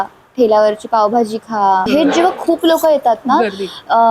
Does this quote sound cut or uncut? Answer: cut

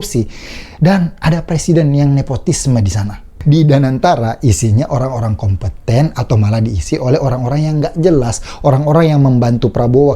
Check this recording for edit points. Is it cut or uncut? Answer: cut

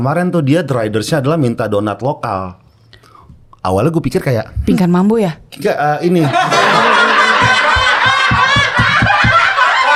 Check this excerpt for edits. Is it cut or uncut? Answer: uncut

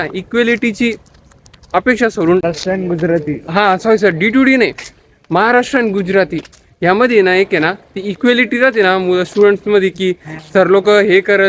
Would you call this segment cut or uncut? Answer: cut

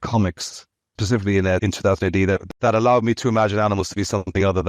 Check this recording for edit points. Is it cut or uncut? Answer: cut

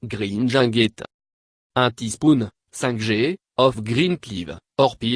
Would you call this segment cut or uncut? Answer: cut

